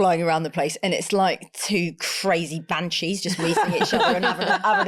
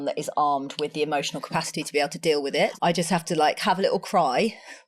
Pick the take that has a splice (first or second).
second